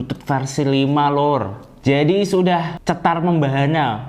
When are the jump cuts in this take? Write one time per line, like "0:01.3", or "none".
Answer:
0:01.7